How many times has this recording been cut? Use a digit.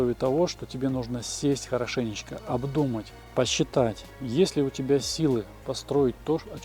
2